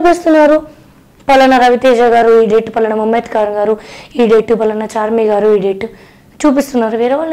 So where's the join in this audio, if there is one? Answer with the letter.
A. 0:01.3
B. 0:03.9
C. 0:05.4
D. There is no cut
D